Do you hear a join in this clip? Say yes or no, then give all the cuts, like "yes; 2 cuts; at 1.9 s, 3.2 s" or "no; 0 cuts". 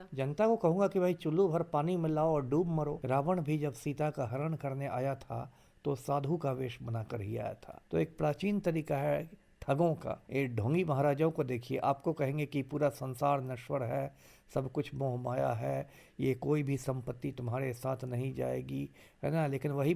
yes; 3 cuts; at 3.0 s, 7.7 s, 10.2 s